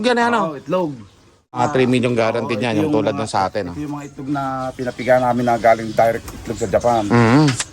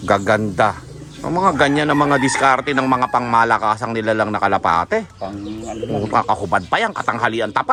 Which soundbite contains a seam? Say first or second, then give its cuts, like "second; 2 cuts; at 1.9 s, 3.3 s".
first; 1 cut; at 1.6 s